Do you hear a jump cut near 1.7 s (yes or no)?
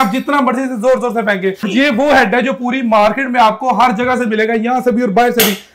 yes